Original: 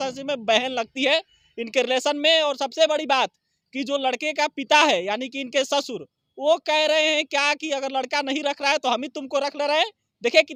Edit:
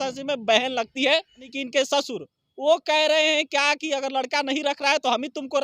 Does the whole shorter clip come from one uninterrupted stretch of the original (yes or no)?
no